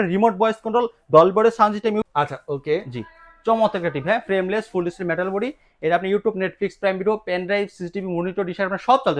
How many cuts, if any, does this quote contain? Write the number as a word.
one